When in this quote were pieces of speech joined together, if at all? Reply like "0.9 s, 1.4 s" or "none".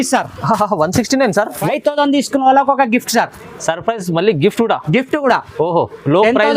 1.6 s